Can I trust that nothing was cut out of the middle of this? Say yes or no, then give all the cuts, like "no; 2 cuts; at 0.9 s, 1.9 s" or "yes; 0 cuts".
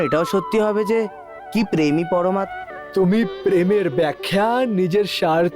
no; 1 cut; at 2.5 s